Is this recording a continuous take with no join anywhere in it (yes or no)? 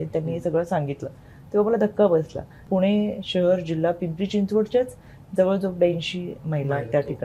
no